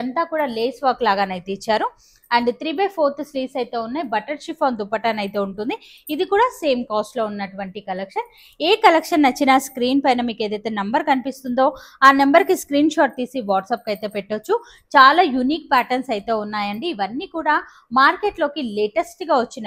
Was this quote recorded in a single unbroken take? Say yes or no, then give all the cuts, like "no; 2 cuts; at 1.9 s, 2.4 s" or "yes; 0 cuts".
yes; 0 cuts